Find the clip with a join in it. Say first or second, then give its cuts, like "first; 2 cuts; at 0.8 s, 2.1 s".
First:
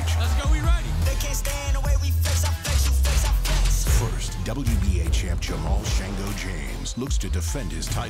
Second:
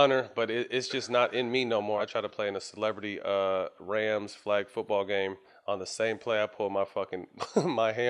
second; 2 cuts; at 2.0 s, 5.5 s